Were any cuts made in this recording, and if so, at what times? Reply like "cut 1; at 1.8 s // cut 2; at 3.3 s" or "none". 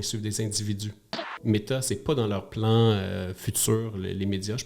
cut 1; at 1.3 s